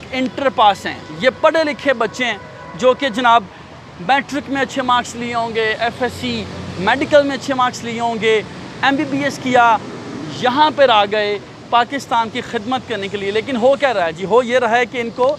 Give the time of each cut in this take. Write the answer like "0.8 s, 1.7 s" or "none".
none